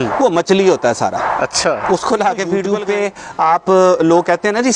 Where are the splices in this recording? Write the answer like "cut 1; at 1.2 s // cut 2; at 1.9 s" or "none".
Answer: cut 1; at 2.8 s

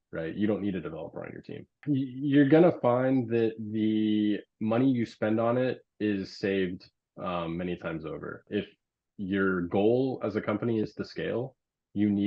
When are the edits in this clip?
cut 1; at 1.7 s // cut 2; at 8.4 s

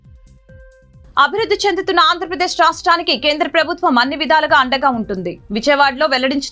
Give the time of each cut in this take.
cut 1; at 1.0 s

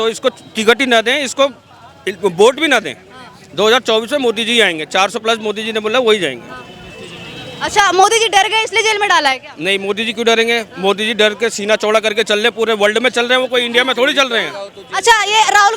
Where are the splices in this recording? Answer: none

